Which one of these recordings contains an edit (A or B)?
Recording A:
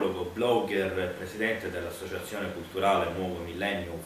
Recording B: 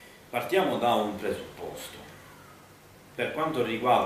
B